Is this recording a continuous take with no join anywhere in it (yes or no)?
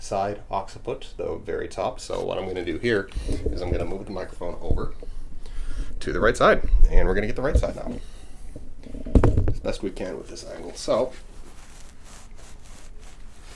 yes